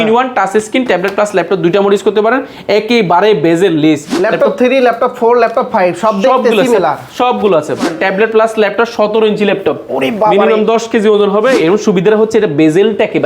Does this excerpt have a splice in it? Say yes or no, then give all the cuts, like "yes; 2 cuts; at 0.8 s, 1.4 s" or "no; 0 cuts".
yes; 3 cuts; at 4.1 s, 7.8 s, 11.6 s